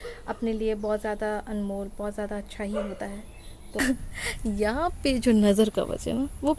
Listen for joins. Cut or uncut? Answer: cut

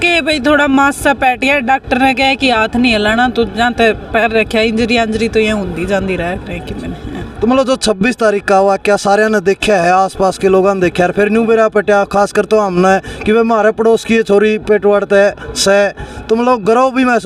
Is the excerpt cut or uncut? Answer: uncut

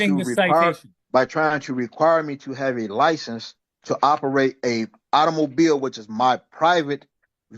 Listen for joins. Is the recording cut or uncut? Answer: cut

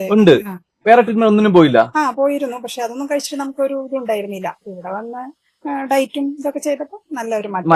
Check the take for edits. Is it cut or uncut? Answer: uncut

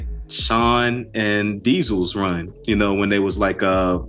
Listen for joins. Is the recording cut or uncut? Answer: uncut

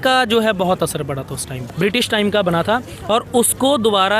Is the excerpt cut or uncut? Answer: cut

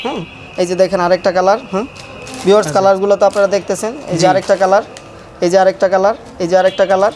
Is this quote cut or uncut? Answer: uncut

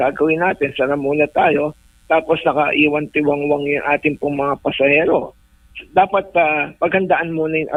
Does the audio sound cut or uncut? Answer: uncut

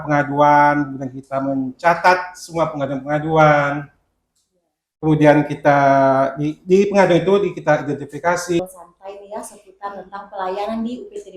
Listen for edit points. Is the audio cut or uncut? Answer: cut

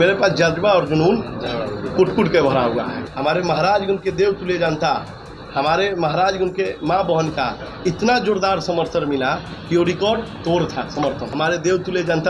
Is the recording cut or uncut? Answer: cut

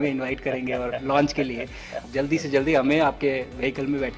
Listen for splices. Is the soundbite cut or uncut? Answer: cut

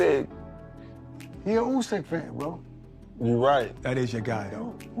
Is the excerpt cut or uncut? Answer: uncut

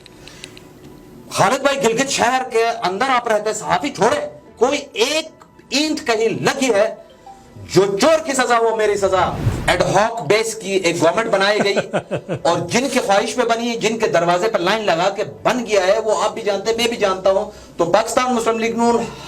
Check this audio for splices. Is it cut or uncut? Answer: cut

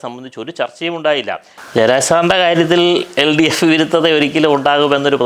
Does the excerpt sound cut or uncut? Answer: cut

